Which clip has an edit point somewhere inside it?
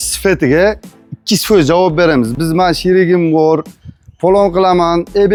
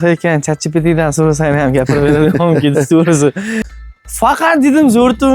second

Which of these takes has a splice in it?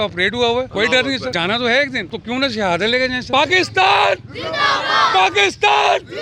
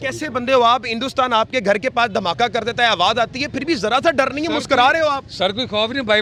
first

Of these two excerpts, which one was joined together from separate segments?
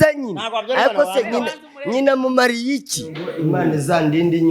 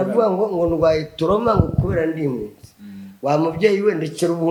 first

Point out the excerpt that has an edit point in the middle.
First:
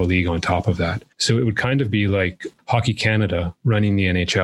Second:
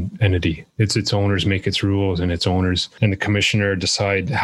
first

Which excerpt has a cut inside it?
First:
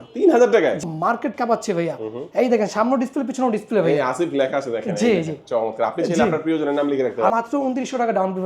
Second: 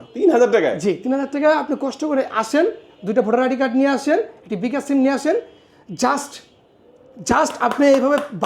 first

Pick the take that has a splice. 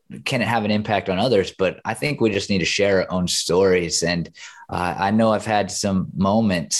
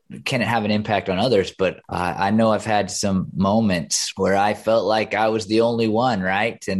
second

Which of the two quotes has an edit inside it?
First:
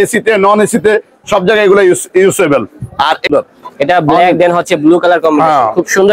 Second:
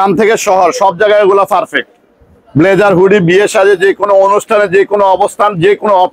first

